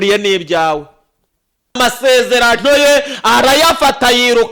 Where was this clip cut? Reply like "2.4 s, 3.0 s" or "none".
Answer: 1.8 s